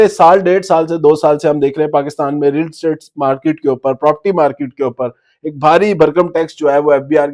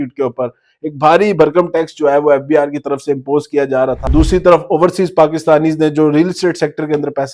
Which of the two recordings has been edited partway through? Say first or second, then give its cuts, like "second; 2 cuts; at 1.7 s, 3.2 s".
second; 1 cut; at 4.1 s